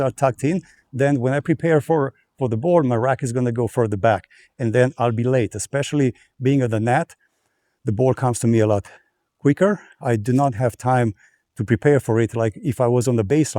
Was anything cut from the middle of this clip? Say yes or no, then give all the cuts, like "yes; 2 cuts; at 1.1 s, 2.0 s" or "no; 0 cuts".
no; 0 cuts